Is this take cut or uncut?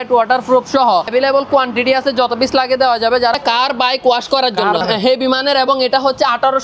cut